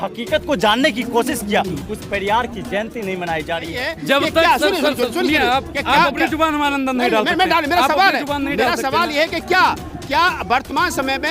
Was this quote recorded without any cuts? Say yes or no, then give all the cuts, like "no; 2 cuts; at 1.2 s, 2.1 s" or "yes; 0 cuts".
no; 1 cut; at 3.9 s